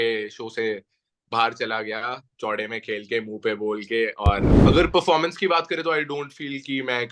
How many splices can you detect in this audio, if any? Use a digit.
1